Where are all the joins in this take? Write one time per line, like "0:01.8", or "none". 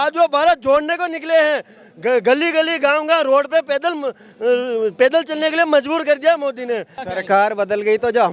0:06.9